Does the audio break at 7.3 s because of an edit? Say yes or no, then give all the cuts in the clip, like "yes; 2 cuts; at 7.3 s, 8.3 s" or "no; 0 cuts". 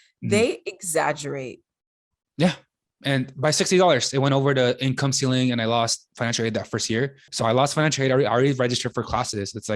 yes; 2 cuts; at 6.1 s, 7.3 s